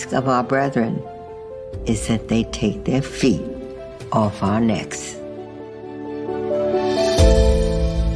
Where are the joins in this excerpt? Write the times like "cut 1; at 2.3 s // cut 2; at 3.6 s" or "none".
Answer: cut 1; at 4.9 s